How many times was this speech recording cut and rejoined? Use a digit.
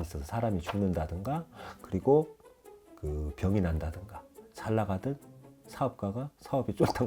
0